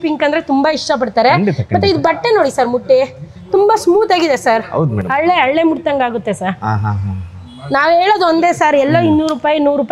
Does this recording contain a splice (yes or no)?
no